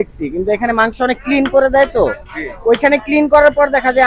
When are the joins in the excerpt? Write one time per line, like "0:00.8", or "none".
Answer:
none